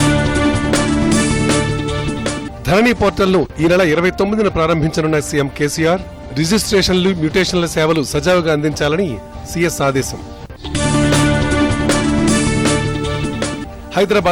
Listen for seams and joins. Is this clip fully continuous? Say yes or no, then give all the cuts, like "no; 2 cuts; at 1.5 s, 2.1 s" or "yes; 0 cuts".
yes; 0 cuts